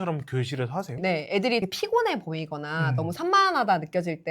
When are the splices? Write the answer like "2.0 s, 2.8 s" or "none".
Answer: 1.6 s